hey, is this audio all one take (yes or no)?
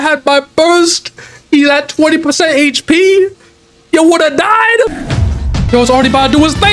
yes